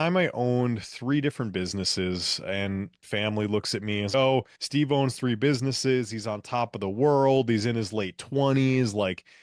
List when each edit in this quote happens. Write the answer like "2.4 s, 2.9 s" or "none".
3.0 s